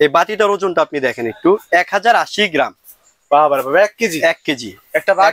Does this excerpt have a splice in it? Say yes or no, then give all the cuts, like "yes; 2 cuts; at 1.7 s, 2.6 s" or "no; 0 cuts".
no; 0 cuts